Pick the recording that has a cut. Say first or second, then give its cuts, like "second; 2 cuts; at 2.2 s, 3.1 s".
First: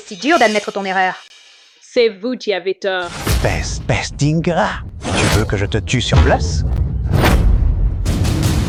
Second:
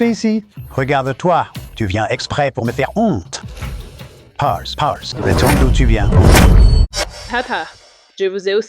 second; 1 cut; at 6.9 s